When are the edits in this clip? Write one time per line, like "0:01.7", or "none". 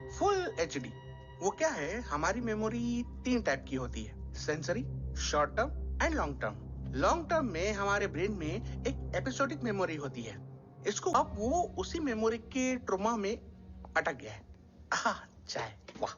0:11.1